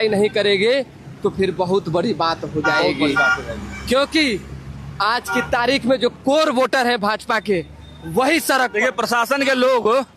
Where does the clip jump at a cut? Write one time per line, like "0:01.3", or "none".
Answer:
none